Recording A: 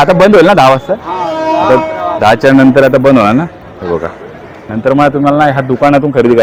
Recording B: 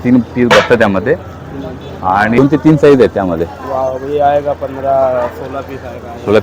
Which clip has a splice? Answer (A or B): B